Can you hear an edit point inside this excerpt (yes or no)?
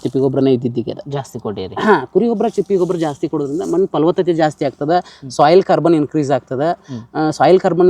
no